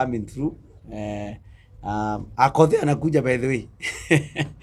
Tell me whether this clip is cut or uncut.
uncut